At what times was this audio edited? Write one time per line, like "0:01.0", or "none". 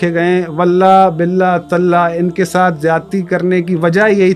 none